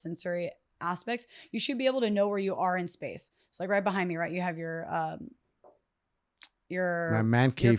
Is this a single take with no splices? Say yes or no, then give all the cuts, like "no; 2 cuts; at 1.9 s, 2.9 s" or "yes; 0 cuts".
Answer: yes; 0 cuts